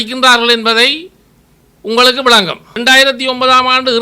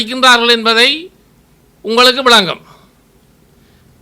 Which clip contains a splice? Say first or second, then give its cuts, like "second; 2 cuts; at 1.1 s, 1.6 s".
first; 1 cut; at 2.7 s